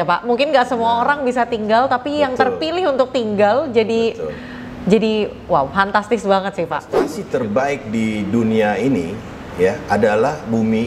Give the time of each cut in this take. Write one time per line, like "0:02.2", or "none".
0:07.2